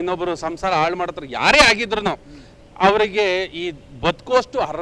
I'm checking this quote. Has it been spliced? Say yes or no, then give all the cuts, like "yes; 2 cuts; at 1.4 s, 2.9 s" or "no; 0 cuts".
no; 0 cuts